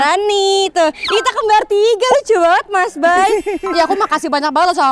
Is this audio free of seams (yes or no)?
yes